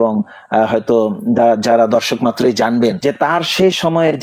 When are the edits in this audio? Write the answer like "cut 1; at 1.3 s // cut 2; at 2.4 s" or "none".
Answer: cut 1; at 3.0 s